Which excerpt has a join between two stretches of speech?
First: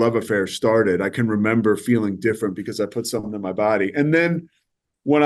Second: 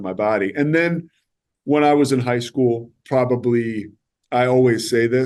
second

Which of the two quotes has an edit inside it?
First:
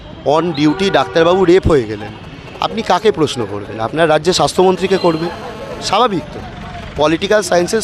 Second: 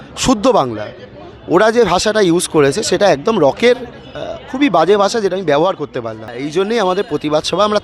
second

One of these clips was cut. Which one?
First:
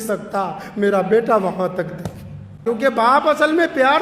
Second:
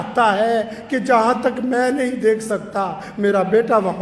first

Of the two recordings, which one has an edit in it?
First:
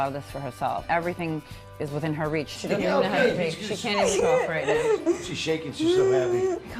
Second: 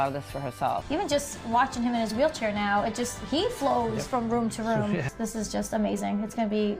second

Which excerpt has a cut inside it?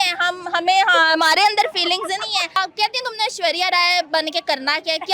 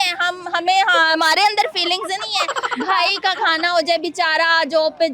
first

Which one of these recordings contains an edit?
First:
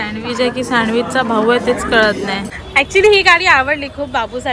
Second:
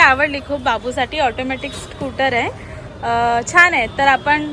first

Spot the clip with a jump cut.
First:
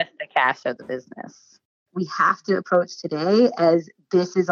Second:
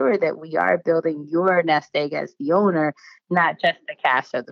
first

